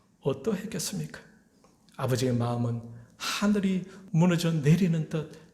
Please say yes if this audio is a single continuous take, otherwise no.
no